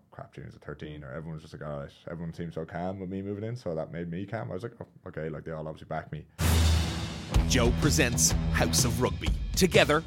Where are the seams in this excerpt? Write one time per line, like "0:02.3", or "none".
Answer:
0:06.3